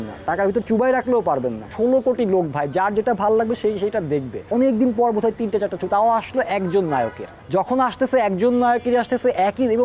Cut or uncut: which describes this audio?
cut